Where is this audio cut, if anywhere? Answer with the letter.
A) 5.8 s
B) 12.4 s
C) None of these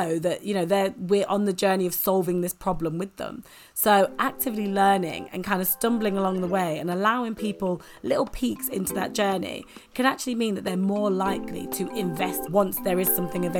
B